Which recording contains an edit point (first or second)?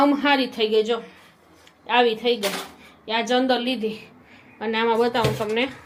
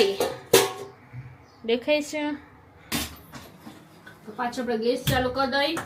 second